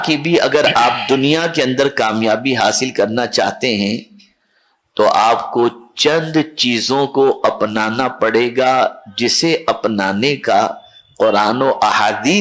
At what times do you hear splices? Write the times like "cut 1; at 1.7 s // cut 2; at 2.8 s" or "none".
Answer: none